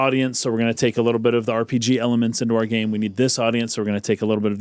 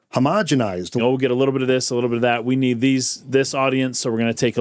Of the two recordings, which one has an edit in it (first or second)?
second